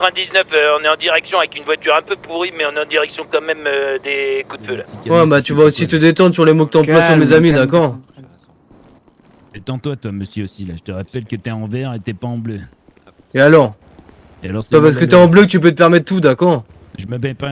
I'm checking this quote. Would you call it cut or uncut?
cut